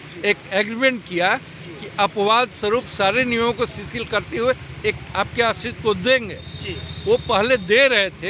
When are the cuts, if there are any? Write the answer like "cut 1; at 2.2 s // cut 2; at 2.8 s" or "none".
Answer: none